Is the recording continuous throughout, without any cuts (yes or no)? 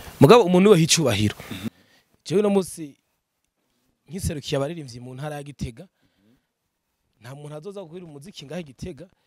no